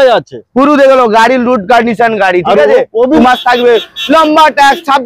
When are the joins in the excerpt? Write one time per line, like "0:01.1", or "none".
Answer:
0:03.2